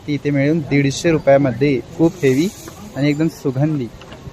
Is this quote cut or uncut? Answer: uncut